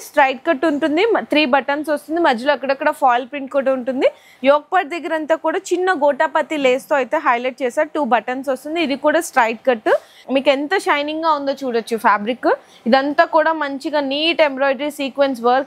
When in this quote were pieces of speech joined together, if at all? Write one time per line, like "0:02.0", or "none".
0:04.3
0:10.2